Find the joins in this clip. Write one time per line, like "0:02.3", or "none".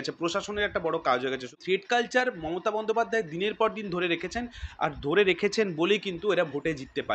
0:01.6